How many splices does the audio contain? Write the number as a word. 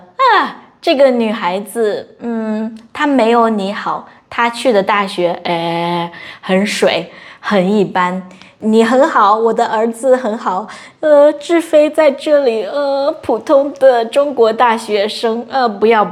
zero